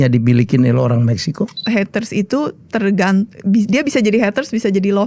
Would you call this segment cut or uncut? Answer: cut